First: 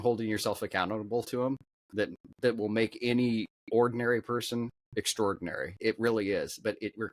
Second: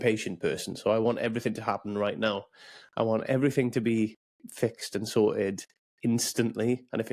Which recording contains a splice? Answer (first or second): first